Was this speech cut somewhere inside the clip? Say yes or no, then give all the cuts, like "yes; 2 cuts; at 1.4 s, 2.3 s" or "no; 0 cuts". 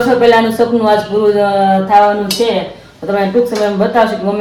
no; 0 cuts